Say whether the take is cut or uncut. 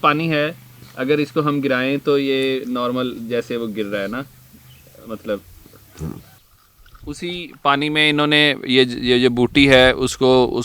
cut